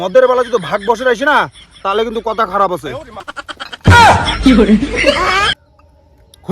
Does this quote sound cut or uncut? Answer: cut